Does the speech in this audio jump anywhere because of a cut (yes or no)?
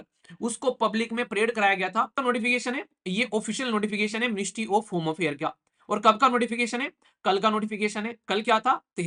yes